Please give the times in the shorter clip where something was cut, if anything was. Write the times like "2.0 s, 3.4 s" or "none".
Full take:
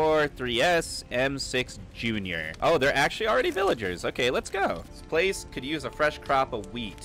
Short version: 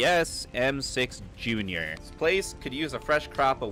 1.9 s